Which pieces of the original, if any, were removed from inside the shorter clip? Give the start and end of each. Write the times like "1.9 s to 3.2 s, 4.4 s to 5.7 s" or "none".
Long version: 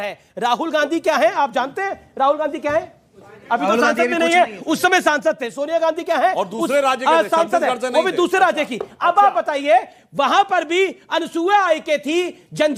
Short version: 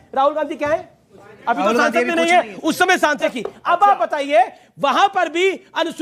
5.4 s to 8.7 s